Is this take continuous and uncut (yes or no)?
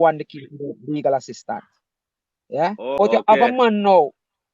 no